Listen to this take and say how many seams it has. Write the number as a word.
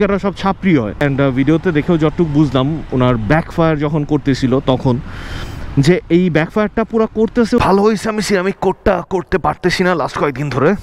two